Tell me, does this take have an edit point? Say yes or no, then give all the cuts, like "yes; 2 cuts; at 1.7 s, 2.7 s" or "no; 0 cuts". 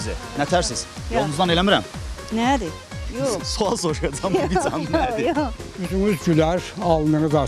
yes; 1 cut; at 5.7 s